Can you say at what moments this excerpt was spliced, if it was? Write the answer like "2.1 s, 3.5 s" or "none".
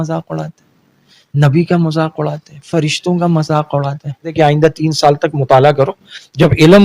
4.3 s